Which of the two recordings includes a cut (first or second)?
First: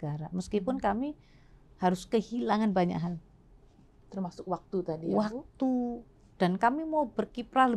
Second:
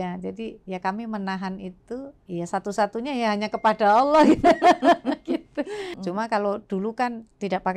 second